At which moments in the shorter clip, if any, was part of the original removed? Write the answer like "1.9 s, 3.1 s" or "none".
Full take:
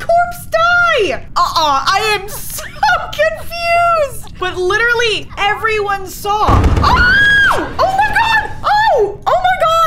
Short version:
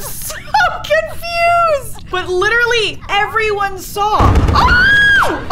none